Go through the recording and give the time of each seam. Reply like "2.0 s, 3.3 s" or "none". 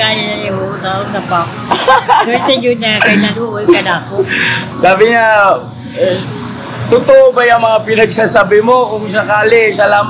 none